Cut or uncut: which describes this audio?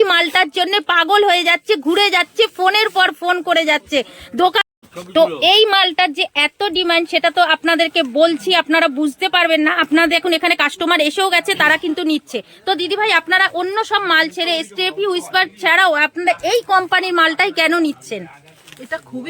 cut